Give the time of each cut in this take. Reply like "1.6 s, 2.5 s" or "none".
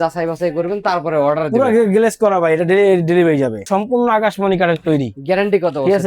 3.7 s